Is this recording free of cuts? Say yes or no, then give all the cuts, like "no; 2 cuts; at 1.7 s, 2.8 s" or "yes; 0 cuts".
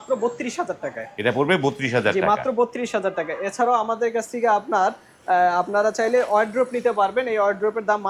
yes; 0 cuts